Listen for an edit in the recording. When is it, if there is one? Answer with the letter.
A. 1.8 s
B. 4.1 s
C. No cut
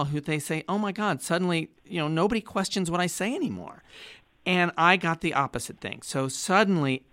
A